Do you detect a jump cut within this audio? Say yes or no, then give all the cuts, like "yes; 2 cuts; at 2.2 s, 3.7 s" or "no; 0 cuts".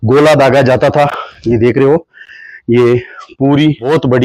no; 0 cuts